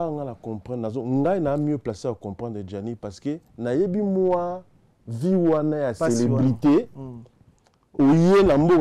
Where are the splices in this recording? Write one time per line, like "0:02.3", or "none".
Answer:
none